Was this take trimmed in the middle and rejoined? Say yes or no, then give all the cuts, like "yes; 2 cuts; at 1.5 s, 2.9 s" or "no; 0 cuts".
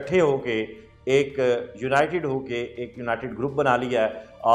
no; 0 cuts